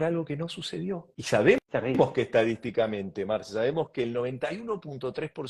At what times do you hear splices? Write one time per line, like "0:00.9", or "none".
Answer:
0:01.1
0:01.7

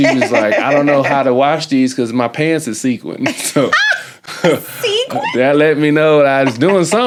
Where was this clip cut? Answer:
none

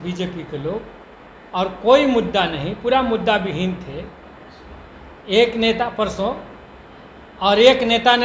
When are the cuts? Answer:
none

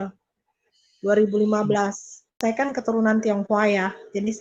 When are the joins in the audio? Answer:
0:02.4

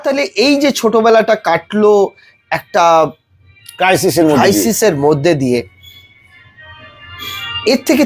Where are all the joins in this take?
none

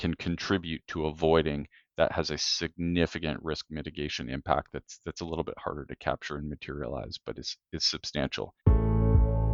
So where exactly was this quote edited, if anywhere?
0:08.6

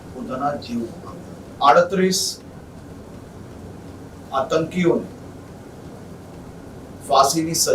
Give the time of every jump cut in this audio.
0:01.4

